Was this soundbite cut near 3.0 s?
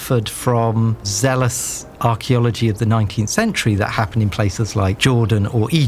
no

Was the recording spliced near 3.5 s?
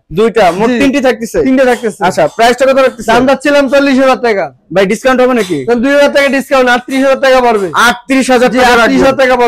no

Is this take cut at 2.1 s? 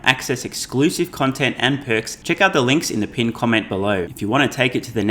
yes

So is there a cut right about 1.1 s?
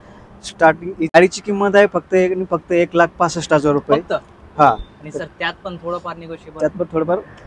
yes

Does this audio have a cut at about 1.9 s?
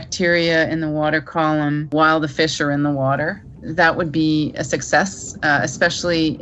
yes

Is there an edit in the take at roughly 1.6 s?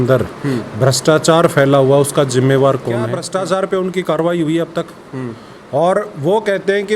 no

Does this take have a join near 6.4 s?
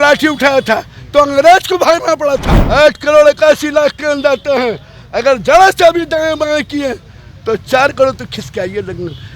no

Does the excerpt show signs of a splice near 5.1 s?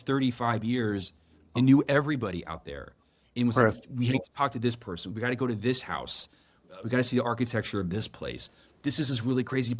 yes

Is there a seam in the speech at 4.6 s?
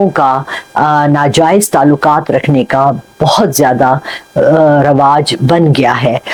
no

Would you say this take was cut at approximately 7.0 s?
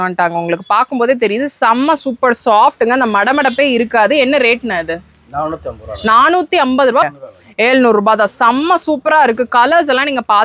yes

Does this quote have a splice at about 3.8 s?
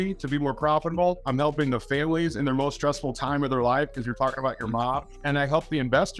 no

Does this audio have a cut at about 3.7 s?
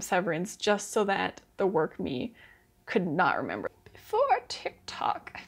yes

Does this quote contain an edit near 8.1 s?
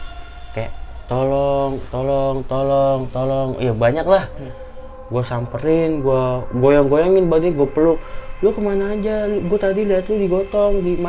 no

